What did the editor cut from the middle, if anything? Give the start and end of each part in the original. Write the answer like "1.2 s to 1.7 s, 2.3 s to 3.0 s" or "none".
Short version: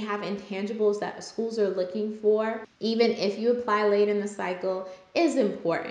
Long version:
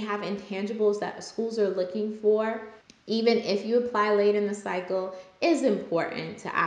2.7 s to 2.9 s